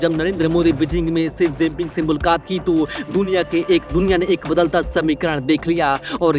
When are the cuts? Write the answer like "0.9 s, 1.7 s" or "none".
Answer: none